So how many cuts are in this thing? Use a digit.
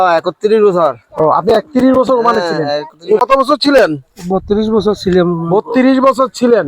1